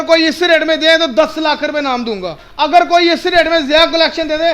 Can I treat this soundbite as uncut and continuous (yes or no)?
no